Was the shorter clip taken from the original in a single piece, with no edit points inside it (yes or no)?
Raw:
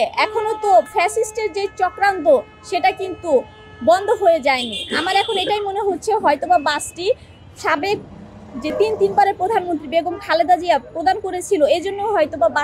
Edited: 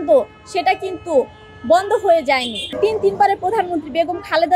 no